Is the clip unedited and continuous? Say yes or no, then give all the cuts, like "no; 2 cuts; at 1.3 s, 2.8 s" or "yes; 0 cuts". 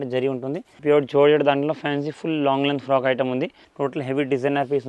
no; 2 cuts; at 0.8 s, 3.6 s